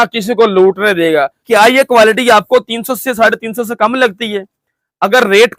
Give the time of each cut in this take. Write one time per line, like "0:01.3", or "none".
0:01.4